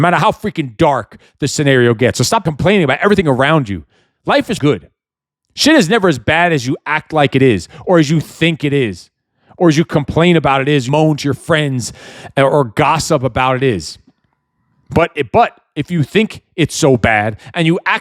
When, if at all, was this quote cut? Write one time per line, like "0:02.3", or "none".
0:02.5
0:04.6
0:10.9

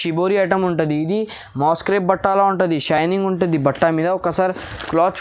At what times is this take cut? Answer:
none

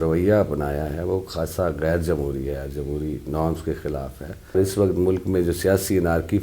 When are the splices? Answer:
0:04.6

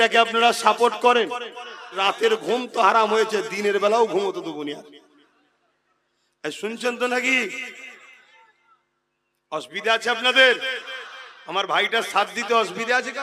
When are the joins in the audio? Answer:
0:01.9

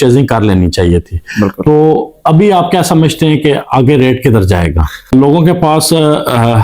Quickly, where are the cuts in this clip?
0:05.1

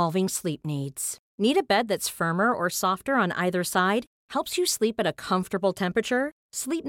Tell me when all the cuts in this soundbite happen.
none

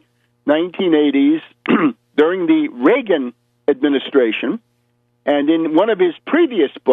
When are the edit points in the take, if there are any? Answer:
0:01.9

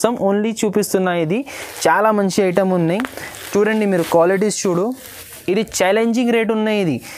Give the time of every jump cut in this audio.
none

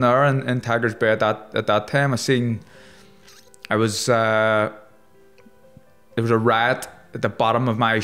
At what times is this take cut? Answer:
none

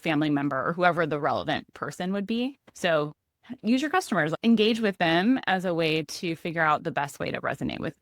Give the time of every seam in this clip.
0:02.7

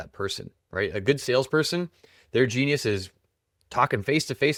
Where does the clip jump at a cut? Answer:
none

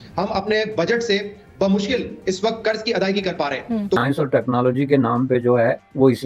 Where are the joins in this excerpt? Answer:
0:04.0

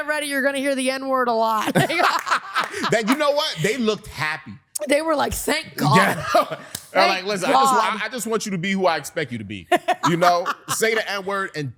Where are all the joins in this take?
none

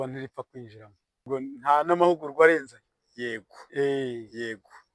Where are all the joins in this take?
0:01.2

